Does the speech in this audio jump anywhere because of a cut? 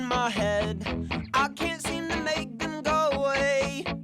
no; 0 cuts

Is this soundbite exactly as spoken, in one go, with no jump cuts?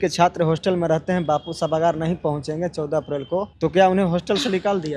no; 1 cut; at 3.5 s

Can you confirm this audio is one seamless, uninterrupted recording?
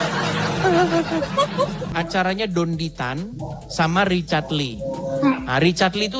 no; 1 cut; at 1.9 s

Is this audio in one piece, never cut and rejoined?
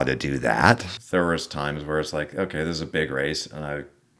no; 1 cut; at 0.9 s

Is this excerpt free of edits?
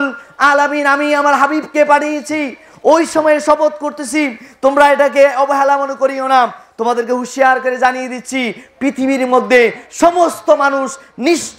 yes; 0 cuts

